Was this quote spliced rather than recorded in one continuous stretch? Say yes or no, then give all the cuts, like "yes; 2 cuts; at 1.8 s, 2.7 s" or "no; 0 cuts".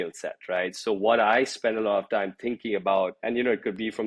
yes; 1 cut; at 3.2 s